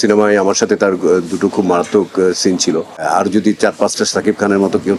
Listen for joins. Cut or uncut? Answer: cut